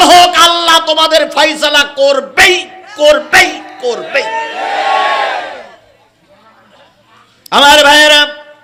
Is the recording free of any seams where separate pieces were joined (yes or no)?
yes